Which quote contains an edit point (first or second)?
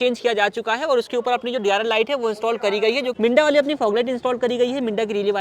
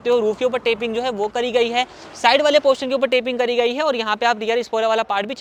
first